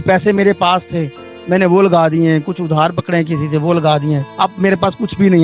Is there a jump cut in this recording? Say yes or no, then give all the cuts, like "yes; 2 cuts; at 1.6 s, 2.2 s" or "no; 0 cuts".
yes; 1 cut; at 4.3 s